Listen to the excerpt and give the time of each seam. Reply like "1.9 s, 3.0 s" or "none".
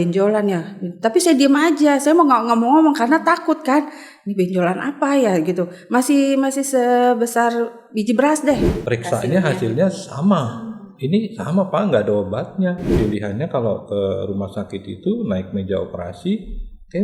8.7 s, 12.9 s